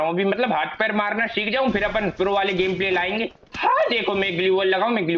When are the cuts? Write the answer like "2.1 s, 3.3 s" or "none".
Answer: 3.4 s